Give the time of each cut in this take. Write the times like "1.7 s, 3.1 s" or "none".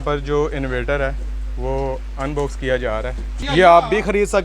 3.4 s